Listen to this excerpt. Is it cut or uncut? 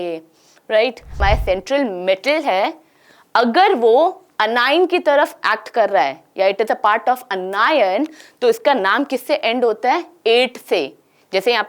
cut